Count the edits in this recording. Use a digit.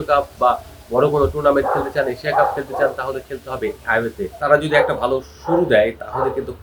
1